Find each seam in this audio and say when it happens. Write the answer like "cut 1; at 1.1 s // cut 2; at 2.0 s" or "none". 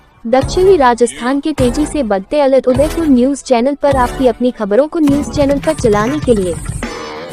none